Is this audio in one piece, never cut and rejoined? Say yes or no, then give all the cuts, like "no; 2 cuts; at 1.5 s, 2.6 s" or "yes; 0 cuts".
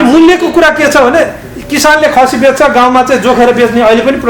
yes; 0 cuts